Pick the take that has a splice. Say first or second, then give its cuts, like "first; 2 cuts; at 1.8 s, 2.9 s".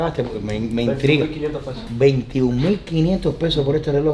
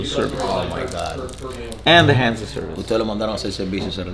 first; 1 cut; at 1.7 s